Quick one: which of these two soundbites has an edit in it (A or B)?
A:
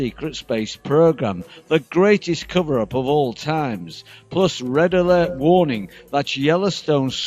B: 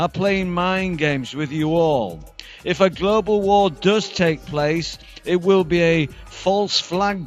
A